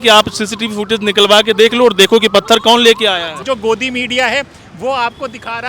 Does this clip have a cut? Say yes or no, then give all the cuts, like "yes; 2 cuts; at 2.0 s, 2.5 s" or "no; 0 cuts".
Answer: yes; 1 cut; at 3.4 s